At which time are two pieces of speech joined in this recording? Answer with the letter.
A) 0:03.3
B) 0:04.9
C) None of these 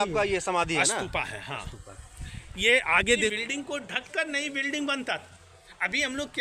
A